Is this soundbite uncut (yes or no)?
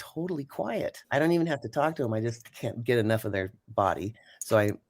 no